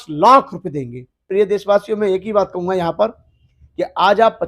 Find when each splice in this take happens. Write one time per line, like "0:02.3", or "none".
0:01.3